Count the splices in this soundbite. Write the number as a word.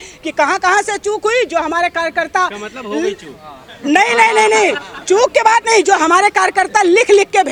zero